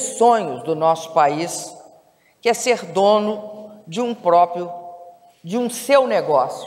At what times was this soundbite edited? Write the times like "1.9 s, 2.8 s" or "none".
none